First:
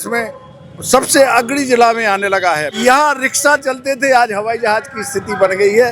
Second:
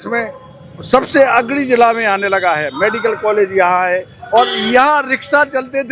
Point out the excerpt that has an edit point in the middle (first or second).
first